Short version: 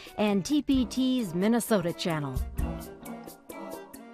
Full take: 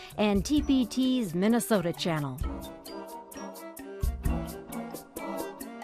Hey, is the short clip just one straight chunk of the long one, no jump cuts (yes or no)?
no